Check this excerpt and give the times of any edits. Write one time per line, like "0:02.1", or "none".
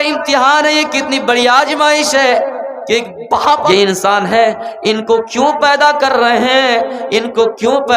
0:03.6